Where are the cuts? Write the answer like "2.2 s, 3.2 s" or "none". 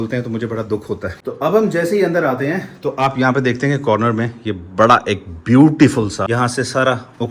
1.2 s, 6.3 s